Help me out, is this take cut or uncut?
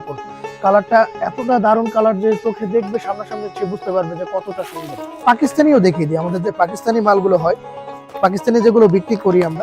cut